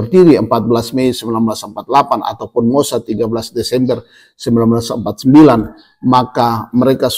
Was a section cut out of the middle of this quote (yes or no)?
no